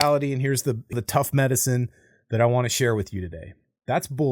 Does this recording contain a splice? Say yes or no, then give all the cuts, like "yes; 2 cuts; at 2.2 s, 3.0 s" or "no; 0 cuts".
yes; 1 cut; at 0.9 s